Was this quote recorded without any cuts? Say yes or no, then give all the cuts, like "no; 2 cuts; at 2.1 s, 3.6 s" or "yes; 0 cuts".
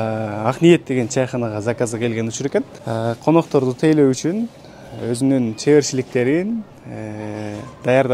no; 1 cut; at 2.8 s